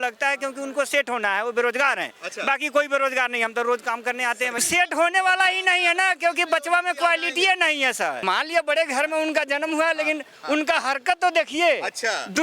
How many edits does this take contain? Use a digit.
2